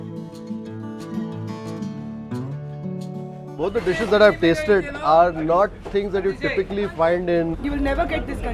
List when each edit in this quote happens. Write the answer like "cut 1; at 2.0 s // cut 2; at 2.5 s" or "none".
none